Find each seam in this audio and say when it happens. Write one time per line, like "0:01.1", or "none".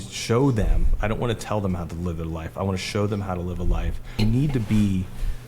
0:04.2